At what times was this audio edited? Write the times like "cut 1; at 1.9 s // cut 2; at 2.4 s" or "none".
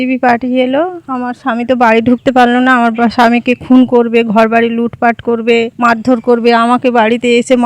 cut 1; at 1.0 s // cut 2; at 5.7 s